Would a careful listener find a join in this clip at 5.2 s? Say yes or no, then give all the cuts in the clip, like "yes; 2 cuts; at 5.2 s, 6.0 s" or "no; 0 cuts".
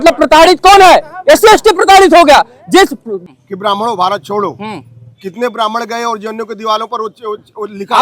no; 1 cut; at 3.1 s